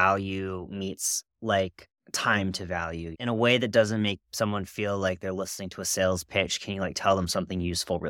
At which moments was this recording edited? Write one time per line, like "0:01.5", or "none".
0:03.1